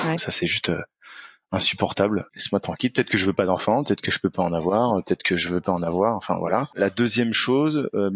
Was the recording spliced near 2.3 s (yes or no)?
yes